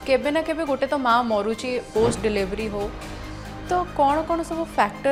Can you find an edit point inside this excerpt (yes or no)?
no